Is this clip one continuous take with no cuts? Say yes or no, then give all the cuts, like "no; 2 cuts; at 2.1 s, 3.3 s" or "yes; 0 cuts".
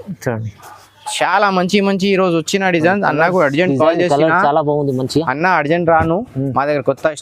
yes; 0 cuts